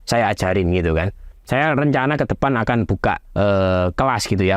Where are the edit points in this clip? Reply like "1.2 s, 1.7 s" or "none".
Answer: 3.2 s